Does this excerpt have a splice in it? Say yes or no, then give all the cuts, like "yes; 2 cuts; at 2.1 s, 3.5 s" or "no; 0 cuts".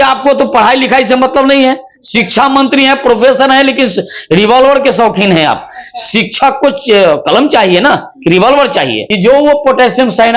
yes; 1 cut; at 9.0 s